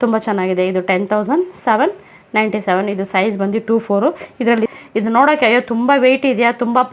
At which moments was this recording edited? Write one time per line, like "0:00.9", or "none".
0:04.8

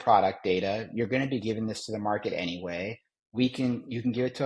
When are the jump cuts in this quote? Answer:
none

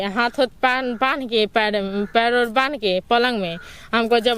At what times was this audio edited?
none

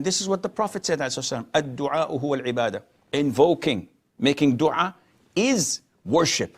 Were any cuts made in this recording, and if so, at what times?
0:02.9

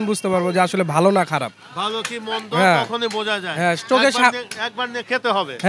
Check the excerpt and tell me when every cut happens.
none

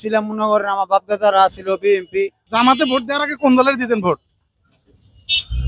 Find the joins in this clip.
0:02.4

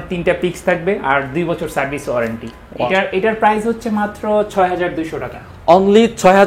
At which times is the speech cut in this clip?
0:02.9

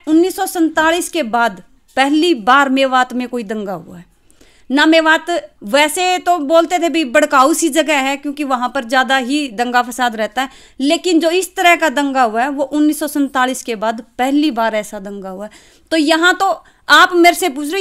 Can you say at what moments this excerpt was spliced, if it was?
none

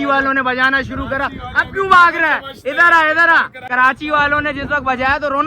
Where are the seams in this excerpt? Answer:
0:03.6

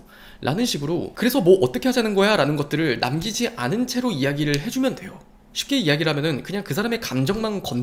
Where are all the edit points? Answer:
none

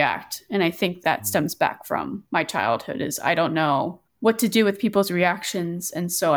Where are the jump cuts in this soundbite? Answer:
0:02.2

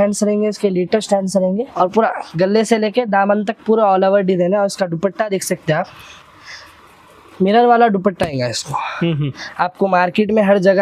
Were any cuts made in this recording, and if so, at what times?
0:01.7

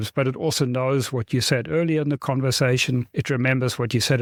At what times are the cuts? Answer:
none

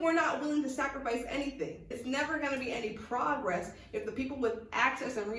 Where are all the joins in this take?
0:01.9

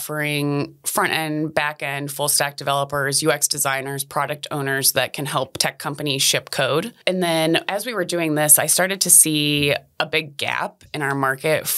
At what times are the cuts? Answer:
0:07.0

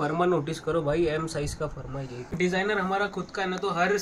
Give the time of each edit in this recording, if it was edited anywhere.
0:02.4

